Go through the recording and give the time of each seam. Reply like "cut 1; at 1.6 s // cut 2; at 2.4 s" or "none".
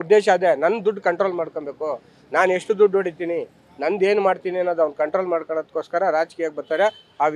none